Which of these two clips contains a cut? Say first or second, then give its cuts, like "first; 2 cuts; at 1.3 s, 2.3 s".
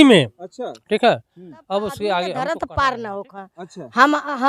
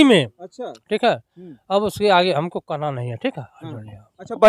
first; 1 cut; at 2.4 s